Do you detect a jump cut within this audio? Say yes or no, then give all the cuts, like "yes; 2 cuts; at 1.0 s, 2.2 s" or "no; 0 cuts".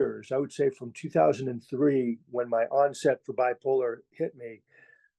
no; 0 cuts